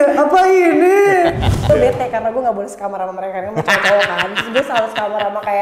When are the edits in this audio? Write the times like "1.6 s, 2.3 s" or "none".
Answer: 1.6 s